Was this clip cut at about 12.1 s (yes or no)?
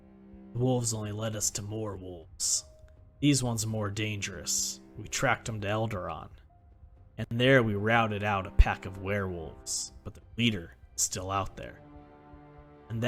no